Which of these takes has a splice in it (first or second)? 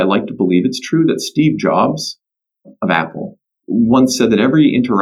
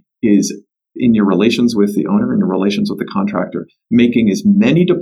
first